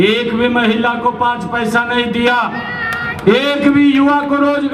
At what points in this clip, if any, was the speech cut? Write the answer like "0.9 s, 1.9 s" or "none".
none